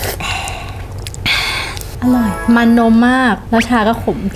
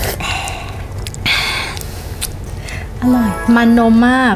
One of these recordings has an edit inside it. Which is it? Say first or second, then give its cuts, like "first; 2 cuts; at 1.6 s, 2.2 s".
first; 2 cuts; at 1.9 s, 3.4 s